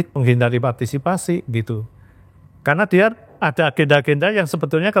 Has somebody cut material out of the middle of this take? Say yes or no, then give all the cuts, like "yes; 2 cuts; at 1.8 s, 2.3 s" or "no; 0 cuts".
no; 0 cuts